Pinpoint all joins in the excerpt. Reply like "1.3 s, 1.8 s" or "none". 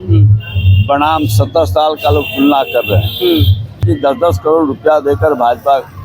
3.9 s

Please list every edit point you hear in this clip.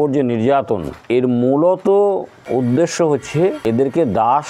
0.9 s, 2.3 s, 3.8 s

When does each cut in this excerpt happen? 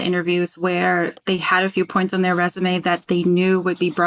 none

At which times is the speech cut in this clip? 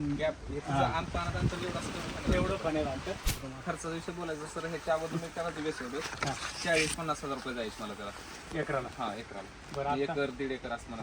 3.3 s

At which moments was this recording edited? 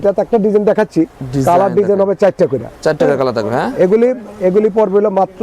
none

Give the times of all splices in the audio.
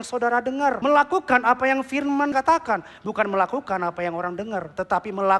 0.8 s, 2.3 s

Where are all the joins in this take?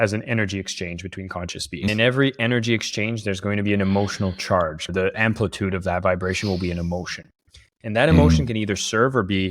1.8 s, 4.9 s

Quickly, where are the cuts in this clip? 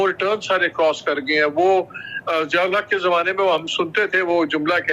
none

